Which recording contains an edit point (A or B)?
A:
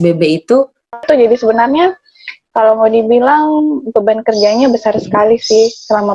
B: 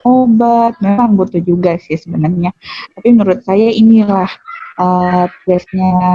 A